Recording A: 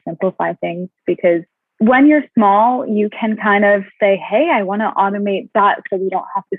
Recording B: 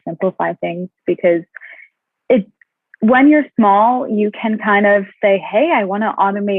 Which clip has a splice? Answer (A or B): A